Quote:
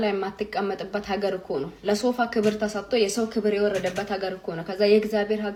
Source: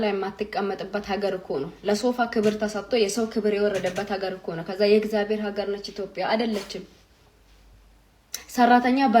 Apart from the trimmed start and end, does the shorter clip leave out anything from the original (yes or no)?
no